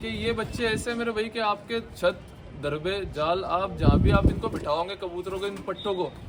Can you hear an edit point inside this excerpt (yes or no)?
no